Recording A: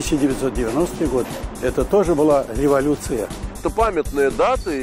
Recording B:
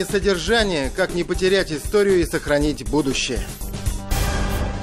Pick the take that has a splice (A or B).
B